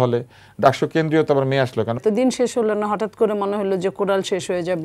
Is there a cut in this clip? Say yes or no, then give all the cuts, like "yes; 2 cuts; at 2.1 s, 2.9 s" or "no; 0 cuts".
yes; 1 cut; at 2.0 s